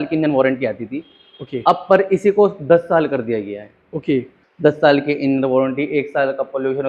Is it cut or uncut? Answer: cut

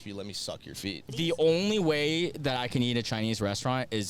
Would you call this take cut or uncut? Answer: cut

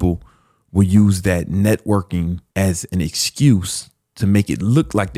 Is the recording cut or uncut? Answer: uncut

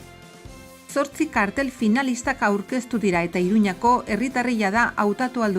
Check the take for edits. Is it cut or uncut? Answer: cut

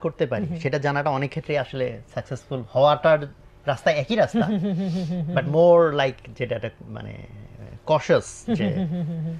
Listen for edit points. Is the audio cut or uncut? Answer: uncut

